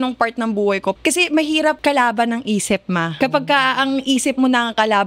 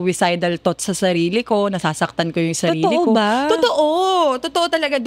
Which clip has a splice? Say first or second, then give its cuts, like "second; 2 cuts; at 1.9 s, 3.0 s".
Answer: first; 3 cuts; at 1.0 s, 1.8 s, 3.2 s